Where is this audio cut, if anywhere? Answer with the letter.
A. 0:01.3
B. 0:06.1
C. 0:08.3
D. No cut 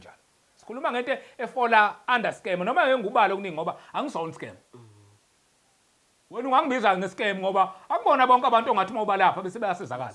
D